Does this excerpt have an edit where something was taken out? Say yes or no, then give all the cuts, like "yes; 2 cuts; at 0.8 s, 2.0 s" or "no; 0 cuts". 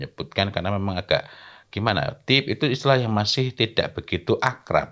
no; 0 cuts